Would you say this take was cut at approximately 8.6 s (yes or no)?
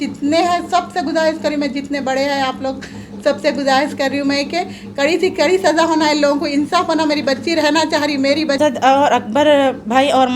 yes